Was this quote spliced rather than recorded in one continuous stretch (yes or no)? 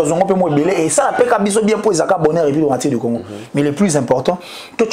no